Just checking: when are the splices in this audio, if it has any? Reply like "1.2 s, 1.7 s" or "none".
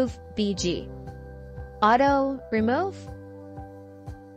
3.0 s